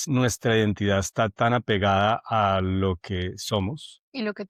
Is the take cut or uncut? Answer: uncut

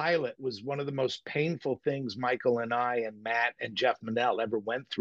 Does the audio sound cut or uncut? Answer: uncut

